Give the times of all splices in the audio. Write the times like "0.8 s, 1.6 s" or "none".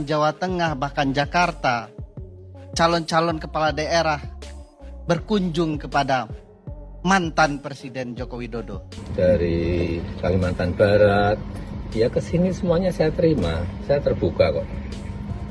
8.8 s